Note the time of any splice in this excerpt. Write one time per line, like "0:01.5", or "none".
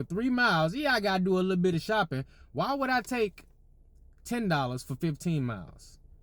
none